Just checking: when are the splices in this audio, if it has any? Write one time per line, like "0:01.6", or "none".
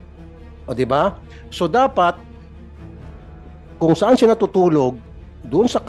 0:02.2
0:03.8